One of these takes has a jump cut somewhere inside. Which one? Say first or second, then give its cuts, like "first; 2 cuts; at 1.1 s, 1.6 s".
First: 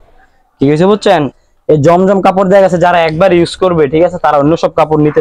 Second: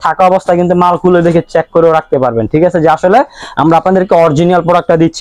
first; 1 cut; at 1.4 s